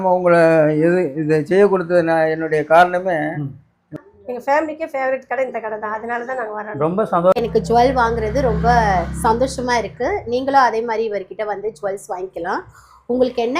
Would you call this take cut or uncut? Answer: cut